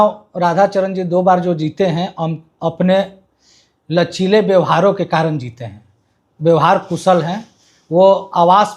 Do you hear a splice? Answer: no; 0 cuts

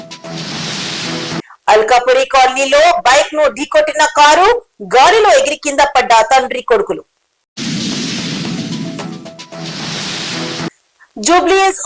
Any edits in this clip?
yes; 1 cut; at 1.3 s

